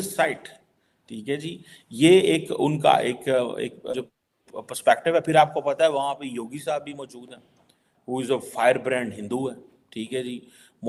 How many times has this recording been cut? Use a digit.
0